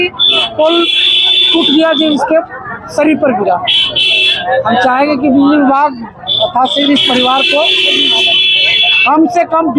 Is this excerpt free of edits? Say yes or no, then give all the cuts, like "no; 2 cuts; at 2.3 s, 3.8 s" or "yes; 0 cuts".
yes; 0 cuts